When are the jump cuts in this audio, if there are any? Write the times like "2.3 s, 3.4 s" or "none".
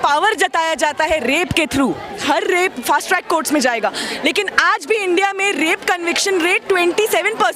2.1 s